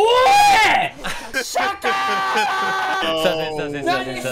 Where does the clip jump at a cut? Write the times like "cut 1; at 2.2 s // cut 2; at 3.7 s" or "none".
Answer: cut 1; at 1.3 s // cut 2; at 3.0 s